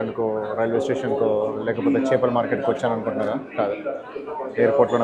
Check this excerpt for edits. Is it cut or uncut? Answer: uncut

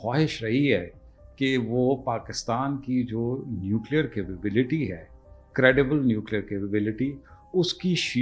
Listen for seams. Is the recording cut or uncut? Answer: uncut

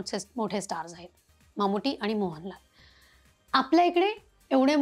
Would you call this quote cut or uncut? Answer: uncut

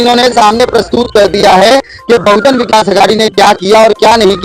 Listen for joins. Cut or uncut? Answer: uncut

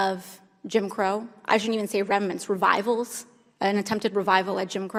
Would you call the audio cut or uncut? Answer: uncut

